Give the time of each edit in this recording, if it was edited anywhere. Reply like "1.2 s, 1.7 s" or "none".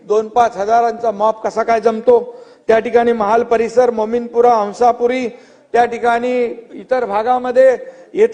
none